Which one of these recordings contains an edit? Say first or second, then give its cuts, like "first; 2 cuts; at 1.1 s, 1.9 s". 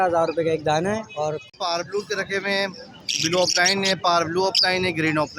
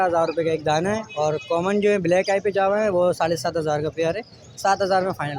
first; 1 cut; at 1.4 s